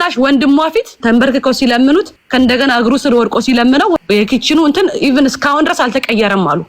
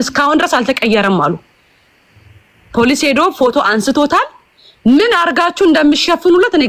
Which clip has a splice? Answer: first; 3 cuts; at 1.0 s, 2.2 s, 4.0 s

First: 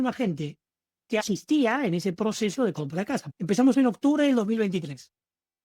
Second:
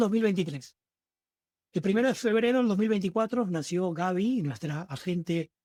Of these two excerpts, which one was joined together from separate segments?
first; 2 cuts; at 1.2 s, 3.3 s

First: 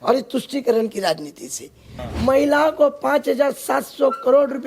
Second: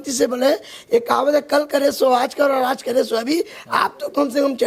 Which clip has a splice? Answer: first; 1 cut; at 1.9 s

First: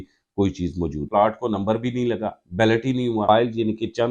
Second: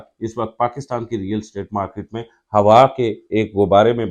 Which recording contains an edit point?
first; 2 cuts; at 1.1 s, 3.2 s

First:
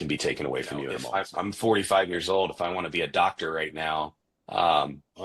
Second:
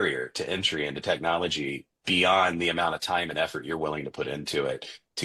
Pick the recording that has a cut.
first; 1 cut; at 1.0 s

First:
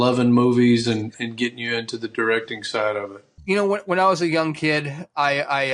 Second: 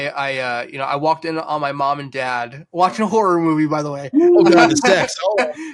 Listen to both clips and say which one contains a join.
first; 1 cut; at 3.3 s

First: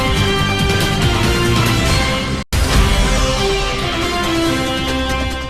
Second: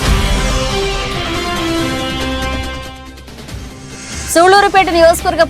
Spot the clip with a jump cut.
second; 1 cut; at 4.1 s

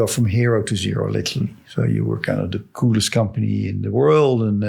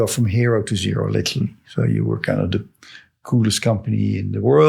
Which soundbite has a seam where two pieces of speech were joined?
first; 1 cut; at 2.6 s

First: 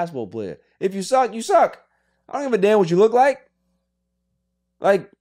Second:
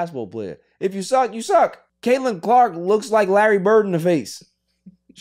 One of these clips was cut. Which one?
second; 1 cut; at 1.9 s

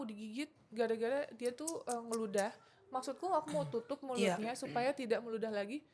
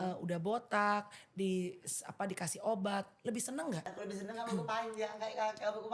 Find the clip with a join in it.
second; 1 cut; at 3.9 s

